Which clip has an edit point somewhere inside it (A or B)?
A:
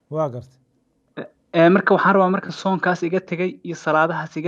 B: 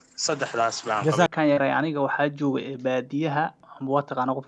B